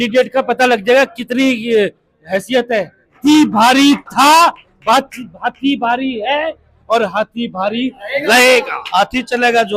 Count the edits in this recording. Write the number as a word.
two